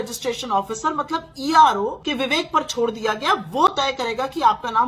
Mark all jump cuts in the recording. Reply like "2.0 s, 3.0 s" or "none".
2.0 s